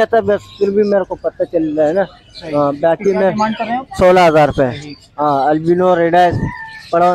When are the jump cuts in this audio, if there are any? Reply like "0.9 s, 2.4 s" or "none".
none